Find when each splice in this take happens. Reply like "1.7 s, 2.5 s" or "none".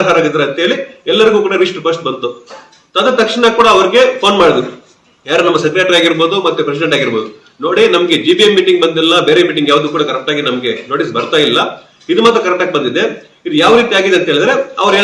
none

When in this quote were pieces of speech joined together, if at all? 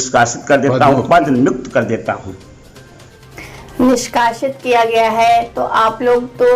2.9 s

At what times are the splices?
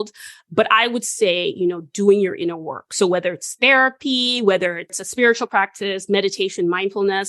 5.0 s

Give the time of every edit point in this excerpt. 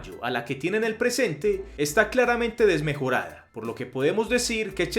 none

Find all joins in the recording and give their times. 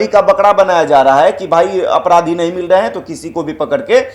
none

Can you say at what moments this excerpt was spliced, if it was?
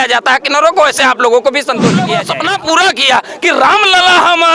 2.2 s

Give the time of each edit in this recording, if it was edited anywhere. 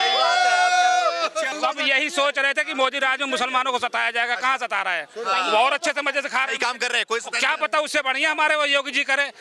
1.5 s

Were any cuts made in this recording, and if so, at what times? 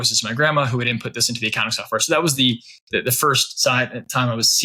none

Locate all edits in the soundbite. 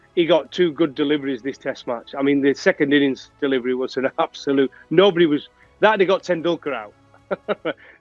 none

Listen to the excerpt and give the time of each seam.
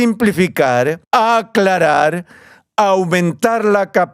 1.0 s

